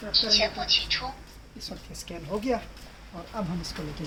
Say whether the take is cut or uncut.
uncut